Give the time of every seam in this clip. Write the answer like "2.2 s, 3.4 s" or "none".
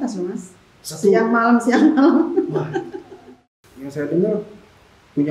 3.4 s